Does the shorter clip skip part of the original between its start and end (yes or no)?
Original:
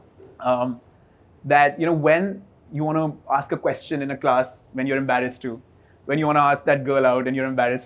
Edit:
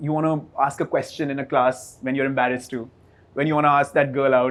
no